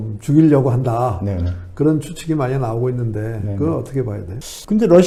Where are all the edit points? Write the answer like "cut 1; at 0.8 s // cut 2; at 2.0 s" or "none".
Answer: none